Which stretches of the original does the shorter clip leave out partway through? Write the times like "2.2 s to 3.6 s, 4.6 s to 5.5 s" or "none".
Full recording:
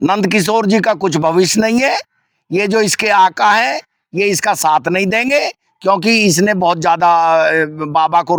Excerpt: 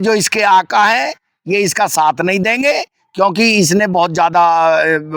none